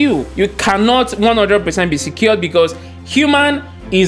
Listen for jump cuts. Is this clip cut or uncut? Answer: uncut